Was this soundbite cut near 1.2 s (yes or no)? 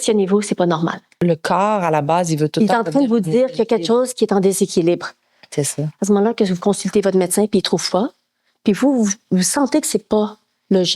yes